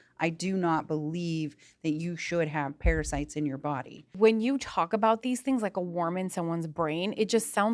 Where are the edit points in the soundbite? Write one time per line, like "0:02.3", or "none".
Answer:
0:04.0